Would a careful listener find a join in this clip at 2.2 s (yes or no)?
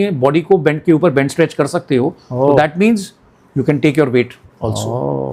no